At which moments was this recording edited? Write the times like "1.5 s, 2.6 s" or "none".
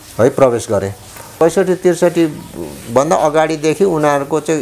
1.3 s